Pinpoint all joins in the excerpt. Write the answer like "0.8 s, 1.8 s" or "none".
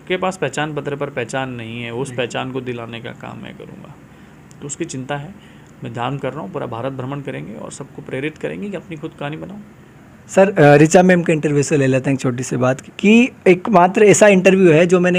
none